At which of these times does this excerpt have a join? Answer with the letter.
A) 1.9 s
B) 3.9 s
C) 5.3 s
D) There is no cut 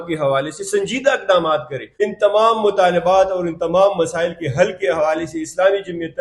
A